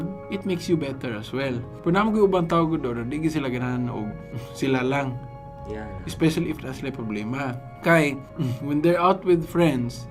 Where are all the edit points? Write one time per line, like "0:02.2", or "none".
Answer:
none